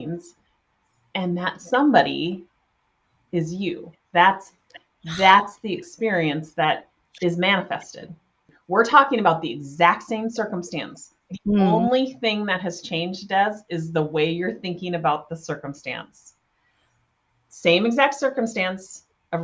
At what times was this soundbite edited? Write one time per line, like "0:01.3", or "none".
0:08.5

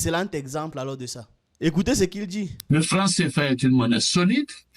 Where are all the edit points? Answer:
none

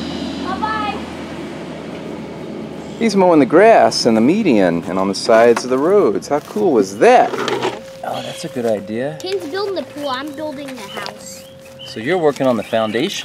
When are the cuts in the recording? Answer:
0:07.7

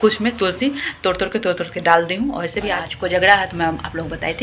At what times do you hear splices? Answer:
0:02.9

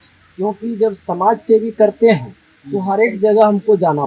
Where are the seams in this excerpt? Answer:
none

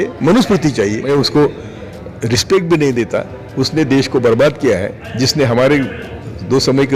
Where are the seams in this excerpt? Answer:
0:01.0

